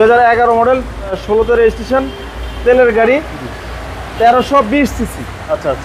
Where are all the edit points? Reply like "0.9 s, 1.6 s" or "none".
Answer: 1.1 s